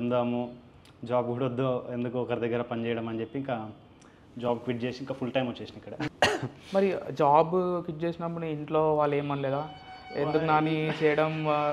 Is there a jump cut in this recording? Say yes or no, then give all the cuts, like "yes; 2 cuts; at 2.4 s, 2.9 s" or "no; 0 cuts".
yes; 1 cut; at 6.1 s